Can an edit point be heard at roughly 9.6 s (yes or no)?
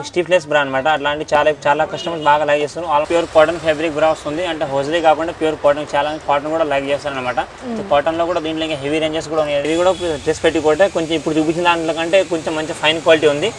yes